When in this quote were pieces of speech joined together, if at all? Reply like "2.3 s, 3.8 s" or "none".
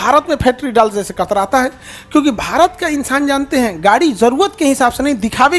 none